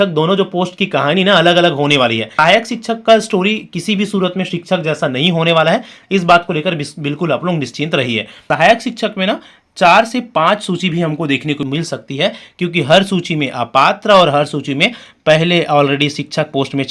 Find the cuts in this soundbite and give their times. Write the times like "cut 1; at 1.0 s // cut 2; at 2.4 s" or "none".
cut 1; at 2.3 s // cut 2; at 8.4 s // cut 3; at 11.6 s